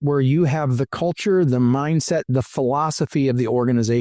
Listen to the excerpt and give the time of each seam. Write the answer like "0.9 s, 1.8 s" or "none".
none